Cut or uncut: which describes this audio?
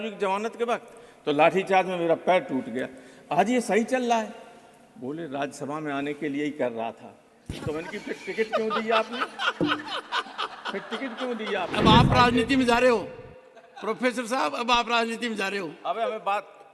cut